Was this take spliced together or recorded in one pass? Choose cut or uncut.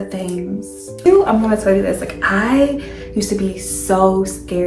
cut